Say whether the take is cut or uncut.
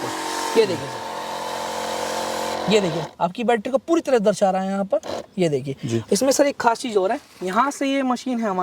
uncut